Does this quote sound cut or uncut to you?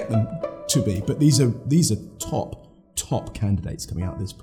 uncut